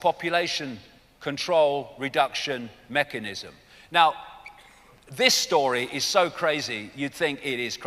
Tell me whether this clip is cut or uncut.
cut